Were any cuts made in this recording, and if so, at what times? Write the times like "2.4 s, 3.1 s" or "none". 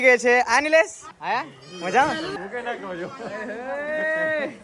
1.1 s, 2.3 s